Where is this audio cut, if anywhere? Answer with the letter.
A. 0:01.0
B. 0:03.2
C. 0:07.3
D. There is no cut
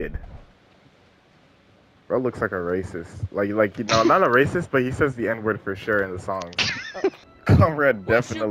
C